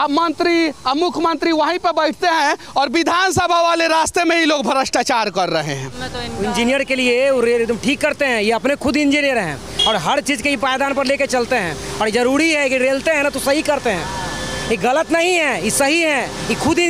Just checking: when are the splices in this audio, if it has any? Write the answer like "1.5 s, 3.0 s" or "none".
none

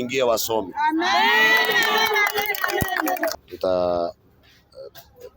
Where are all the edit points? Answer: 3.4 s

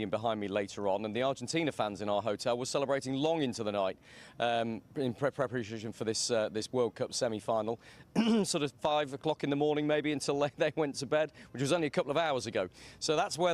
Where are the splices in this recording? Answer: 4.9 s

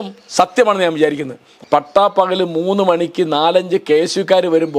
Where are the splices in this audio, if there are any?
1.5 s

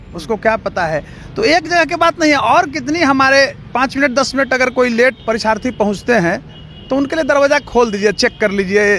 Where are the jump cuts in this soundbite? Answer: 3.7 s, 5.2 s

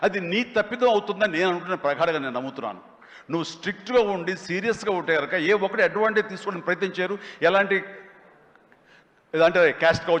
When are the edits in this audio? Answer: none

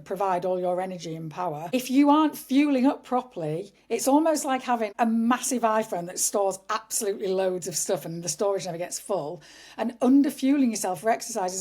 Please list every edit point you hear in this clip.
1.6 s, 4.9 s

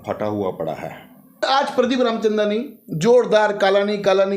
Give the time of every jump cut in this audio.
1.4 s

